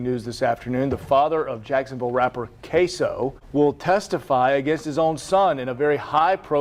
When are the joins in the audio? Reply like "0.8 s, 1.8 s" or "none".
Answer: 3.4 s